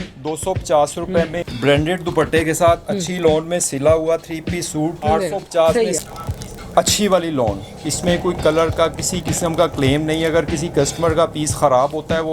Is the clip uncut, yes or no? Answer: no